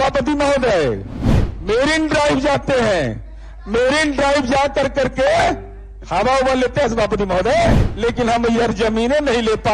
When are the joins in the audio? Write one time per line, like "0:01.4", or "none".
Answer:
0:07.9